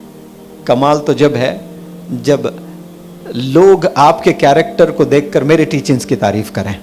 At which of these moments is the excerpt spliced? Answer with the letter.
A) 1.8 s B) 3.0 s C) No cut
C